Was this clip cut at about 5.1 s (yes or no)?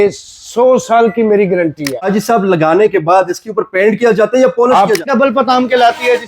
yes